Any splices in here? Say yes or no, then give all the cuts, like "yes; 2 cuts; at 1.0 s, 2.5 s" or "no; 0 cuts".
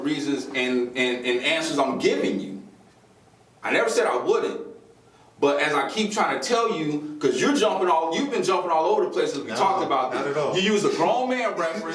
no; 0 cuts